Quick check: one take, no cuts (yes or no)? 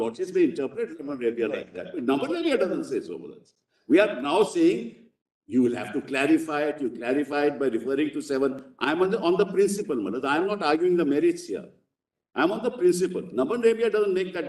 yes